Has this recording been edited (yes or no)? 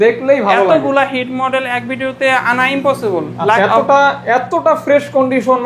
yes